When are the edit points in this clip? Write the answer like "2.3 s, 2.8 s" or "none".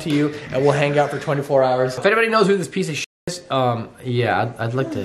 2.0 s